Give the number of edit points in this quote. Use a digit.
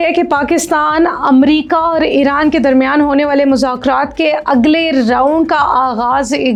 0